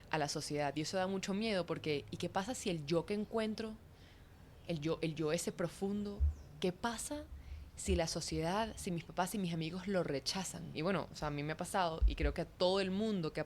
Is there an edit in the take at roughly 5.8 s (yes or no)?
no